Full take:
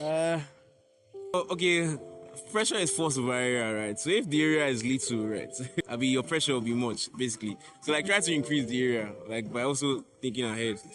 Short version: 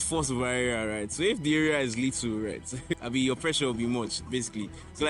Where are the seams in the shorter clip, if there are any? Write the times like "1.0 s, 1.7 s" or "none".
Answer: none